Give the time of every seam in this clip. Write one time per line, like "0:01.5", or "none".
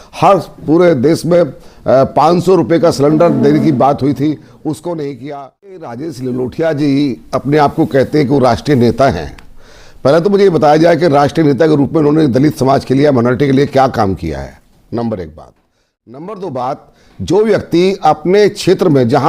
0:05.9